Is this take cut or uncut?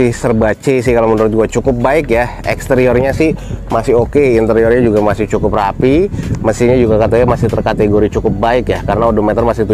uncut